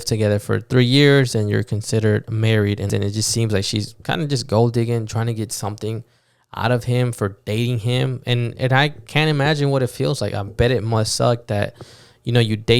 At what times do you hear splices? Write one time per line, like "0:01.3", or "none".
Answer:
0:02.9